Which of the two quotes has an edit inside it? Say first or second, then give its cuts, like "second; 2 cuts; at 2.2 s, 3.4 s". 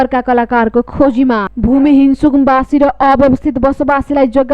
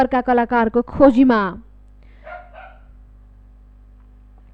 first; 1 cut; at 1.5 s